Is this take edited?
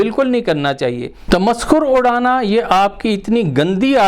yes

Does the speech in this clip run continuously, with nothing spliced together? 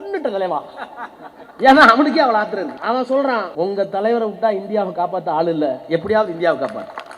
no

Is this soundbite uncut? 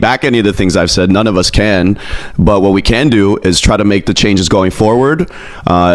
yes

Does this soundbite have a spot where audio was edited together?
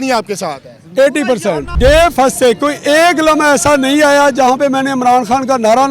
yes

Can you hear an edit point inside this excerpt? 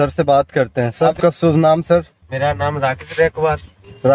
yes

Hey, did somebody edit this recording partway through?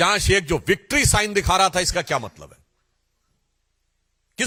no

